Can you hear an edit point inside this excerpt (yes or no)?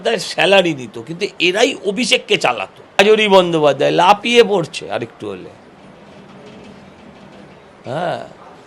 yes